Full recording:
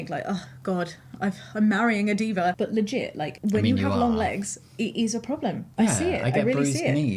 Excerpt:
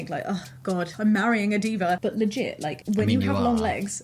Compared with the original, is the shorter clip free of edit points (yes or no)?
no